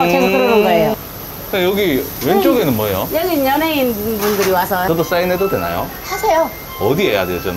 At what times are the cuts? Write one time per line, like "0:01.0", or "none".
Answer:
0:01.0
0:04.8